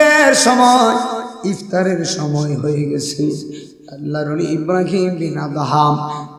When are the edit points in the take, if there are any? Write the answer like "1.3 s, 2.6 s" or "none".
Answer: none

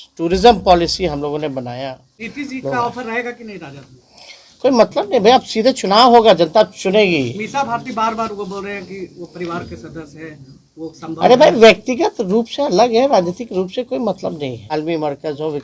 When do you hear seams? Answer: 2.1 s, 14.6 s

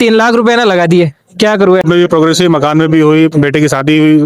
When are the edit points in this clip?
1.8 s

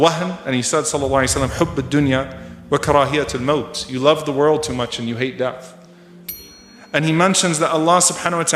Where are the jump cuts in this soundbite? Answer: 6.3 s

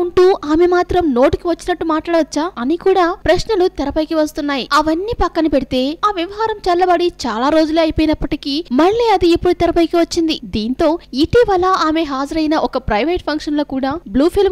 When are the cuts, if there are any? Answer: 6.5 s

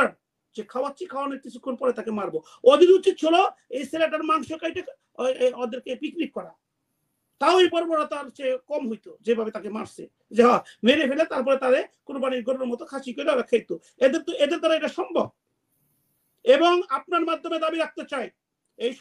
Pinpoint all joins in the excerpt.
none

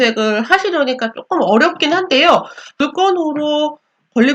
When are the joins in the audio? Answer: 2.8 s

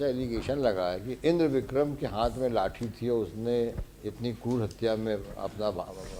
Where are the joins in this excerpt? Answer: none

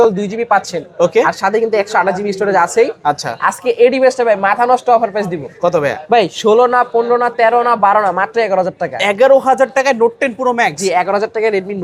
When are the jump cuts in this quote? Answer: none

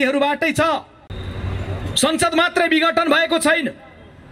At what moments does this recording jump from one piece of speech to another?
1.0 s

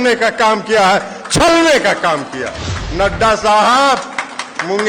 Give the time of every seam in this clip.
2.8 s

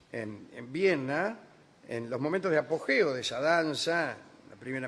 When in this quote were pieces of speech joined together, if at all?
1.4 s

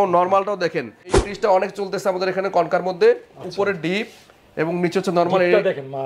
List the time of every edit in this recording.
1.2 s

